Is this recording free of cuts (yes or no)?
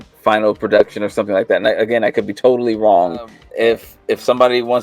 no